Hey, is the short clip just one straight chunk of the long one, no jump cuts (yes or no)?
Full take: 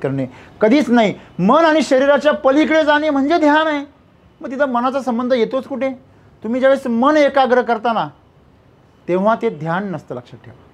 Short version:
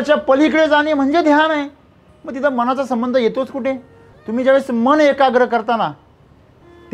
yes